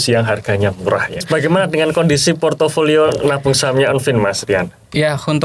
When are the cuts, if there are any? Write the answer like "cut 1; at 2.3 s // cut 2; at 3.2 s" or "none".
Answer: cut 1; at 1.2 s